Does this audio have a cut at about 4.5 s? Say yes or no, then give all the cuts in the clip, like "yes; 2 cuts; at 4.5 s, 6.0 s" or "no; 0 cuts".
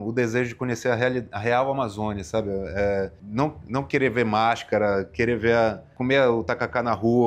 no; 2 cuts; at 3.2 s, 5.9 s